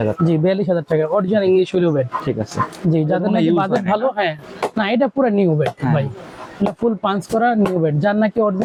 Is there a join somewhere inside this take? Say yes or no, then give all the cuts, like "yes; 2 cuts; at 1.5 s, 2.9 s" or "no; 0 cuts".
no; 0 cuts